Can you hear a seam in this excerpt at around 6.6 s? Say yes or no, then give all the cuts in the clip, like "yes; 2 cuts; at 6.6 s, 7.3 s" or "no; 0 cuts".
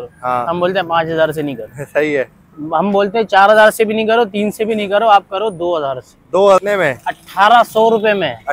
yes; 1 cut; at 6.6 s